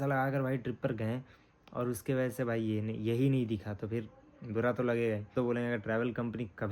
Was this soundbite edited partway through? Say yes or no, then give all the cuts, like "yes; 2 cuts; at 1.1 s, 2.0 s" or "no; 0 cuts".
yes; 1 cut; at 5.3 s